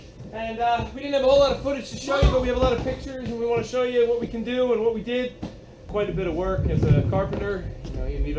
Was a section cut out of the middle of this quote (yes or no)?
yes